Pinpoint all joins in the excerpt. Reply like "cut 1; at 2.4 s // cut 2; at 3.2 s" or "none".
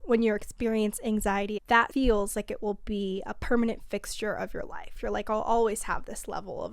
cut 1; at 1.8 s